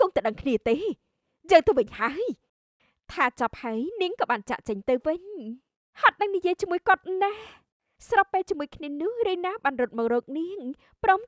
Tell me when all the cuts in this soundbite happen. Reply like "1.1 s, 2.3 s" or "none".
none